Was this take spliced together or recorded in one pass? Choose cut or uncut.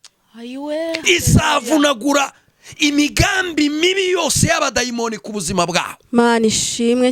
uncut